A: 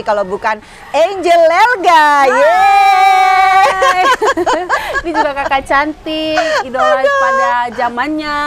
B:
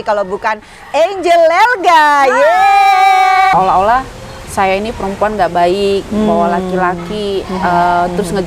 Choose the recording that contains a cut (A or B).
B